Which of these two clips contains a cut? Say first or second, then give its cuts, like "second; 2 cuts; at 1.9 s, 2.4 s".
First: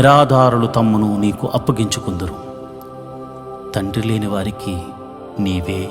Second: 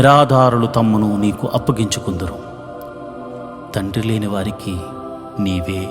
second; 2 cuts; at 2.3 s, 3.7 s